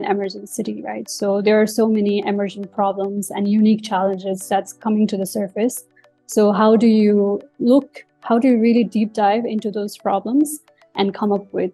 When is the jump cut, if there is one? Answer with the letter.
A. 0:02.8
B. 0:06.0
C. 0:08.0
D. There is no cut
D